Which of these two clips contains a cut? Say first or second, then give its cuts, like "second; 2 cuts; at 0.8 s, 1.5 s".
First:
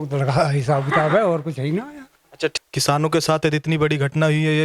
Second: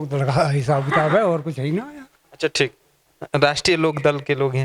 first; 1 cut; at 2.5 s